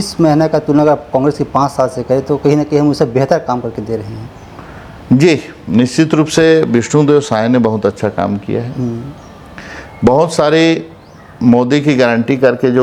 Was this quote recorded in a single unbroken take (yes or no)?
yes